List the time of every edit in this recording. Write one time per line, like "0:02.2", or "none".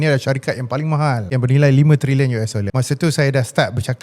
0:01.2
0:02.7